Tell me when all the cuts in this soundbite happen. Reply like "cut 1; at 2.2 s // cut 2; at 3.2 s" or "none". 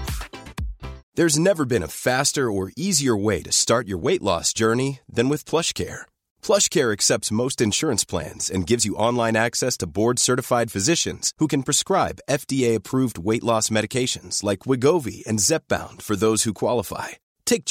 cut 1; at 1.0 s